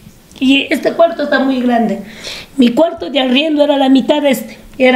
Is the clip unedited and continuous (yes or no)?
yes